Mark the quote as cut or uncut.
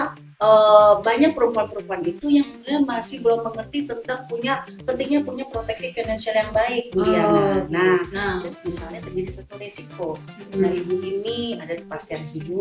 cut